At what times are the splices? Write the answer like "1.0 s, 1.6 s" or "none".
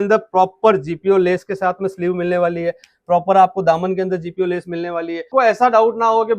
5.3 s